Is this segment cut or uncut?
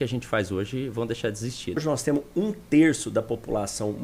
cut